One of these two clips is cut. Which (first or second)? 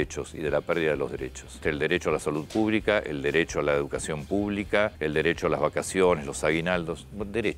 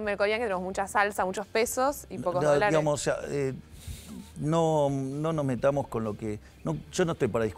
first